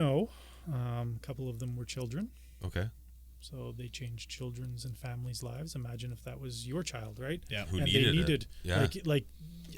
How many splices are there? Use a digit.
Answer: 0